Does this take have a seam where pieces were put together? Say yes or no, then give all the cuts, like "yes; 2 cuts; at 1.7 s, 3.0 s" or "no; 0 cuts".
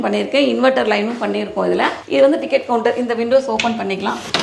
no; 0 cuts